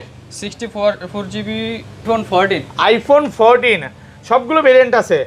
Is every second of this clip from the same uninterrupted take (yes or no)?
no